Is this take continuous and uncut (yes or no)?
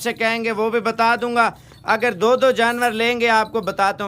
yes